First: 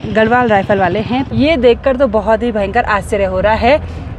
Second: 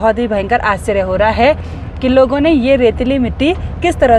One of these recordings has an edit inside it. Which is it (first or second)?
first